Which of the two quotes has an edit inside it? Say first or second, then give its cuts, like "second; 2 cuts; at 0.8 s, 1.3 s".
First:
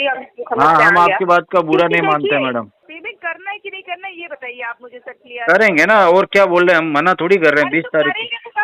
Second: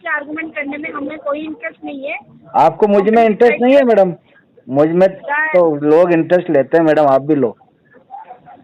first; 1 cut; at 2.8 s